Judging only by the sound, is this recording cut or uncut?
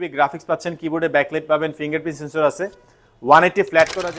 uncut